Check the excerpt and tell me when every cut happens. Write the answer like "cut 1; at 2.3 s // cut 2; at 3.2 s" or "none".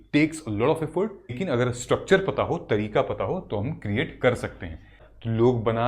cut 1; at 1.4 s // cut 2; at 5.0 s